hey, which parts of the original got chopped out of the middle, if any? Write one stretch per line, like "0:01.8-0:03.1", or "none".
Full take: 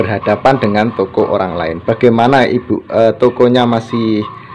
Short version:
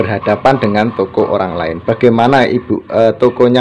none